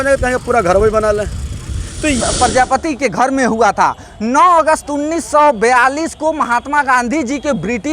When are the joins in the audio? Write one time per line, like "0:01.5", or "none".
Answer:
0:02.2